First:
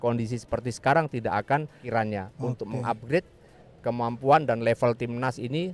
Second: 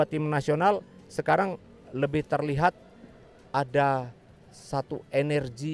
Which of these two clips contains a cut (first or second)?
first